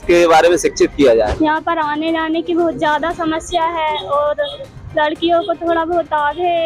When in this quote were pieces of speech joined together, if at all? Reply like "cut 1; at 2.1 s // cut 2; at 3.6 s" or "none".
cut 1; at 1.3 s